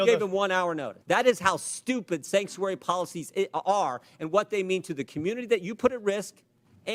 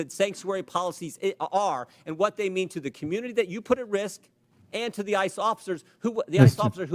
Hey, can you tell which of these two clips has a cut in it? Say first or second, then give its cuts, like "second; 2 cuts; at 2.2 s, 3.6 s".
first; 1 cut; at 0.9 s